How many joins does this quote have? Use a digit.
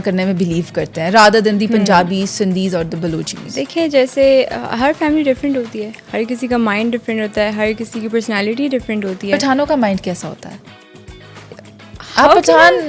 0